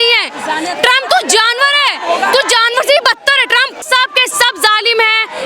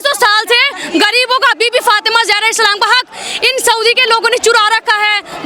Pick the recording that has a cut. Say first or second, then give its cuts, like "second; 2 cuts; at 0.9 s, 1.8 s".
first; 1 cut; at 3.8 s